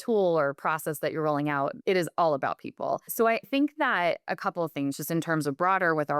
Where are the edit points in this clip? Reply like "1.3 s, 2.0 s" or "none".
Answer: 3.1 s